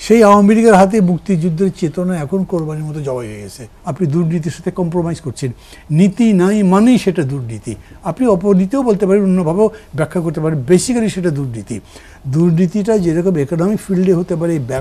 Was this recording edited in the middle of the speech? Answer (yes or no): yes